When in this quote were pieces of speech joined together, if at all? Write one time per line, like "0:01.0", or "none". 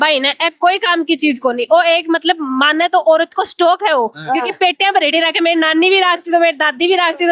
none